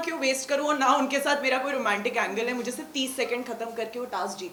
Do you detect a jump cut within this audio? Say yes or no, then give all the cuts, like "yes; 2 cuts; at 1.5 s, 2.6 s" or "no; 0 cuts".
no; 0 cuts